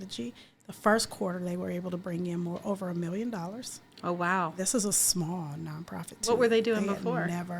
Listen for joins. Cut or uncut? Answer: uncut